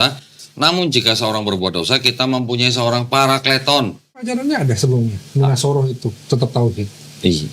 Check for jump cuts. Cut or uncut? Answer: cut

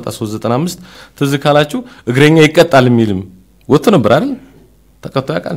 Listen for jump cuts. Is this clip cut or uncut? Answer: uncut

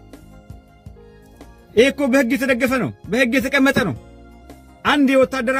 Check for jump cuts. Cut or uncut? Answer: uncut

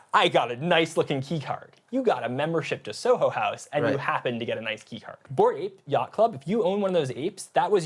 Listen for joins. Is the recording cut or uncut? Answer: cut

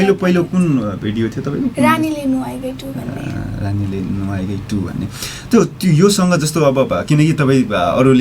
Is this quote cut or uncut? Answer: uncut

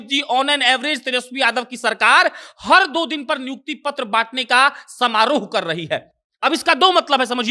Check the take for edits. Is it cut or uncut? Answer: uncut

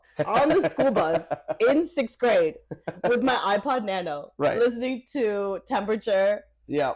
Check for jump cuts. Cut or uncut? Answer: uncut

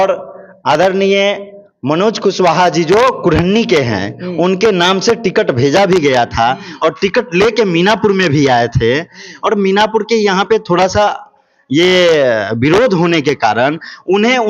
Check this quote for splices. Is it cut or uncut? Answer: uncut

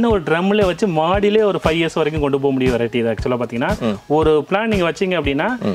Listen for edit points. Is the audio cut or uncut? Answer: uncut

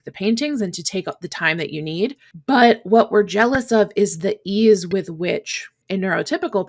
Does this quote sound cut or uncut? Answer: cut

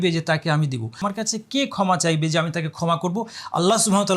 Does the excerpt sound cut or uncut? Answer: cut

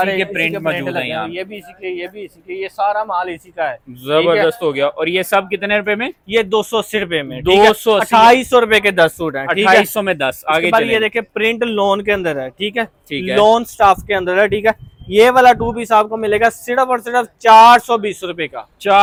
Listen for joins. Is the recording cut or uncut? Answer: uncut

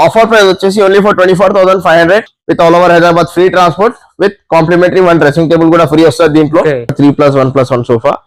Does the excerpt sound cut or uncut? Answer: cut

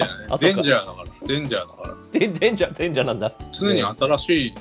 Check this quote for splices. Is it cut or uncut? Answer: cut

